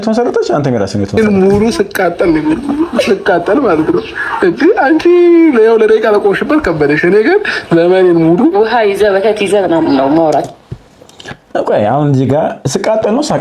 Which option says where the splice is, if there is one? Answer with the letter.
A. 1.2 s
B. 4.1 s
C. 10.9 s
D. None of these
A